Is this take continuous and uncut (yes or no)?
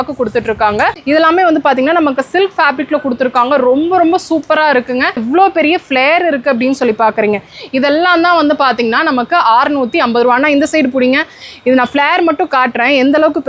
no